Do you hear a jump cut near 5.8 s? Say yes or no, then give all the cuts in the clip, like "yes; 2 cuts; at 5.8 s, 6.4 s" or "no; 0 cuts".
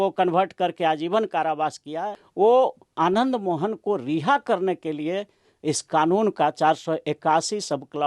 no; 1 cut; at 2.2 s